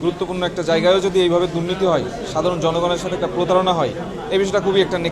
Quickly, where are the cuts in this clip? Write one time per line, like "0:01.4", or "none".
none